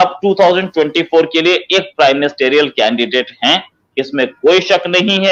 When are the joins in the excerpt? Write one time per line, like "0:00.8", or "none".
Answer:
none